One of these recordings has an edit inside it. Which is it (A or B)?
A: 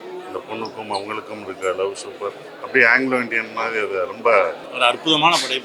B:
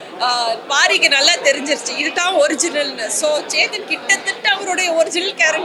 A